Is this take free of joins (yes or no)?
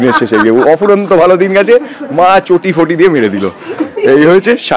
yes